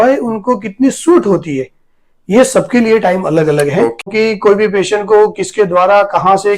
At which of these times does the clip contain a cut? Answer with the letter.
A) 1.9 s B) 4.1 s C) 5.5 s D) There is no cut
B